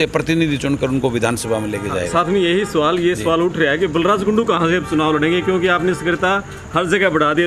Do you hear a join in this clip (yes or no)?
no